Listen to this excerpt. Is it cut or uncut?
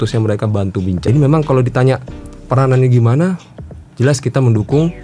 cut